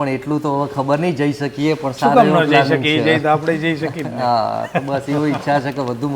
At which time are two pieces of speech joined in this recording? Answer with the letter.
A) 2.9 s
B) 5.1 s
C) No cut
C